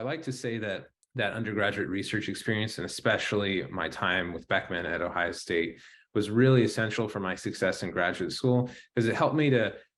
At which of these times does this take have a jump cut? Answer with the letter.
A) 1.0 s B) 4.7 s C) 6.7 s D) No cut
A